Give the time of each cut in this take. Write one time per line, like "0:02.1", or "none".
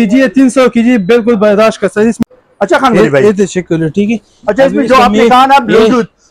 0:02.2